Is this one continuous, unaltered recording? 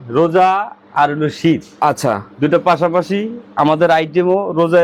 yes; 0 cuts

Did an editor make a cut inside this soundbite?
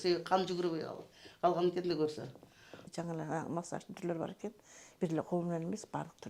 yes; 1 cut; at 2.8 s

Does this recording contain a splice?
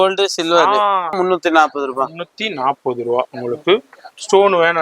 yes; 1 cut; at 1.2 s

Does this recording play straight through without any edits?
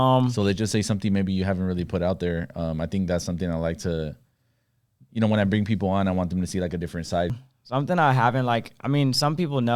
no; 1 cut; at 7.3 s

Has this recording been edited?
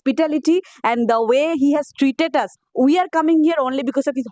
yes; 1 cut; at 2.6 s

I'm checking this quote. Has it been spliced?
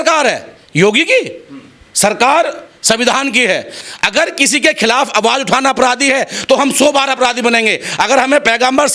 yes; 1 cut; at 3.7 s

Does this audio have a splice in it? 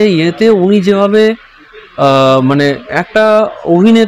no; 0 cuts

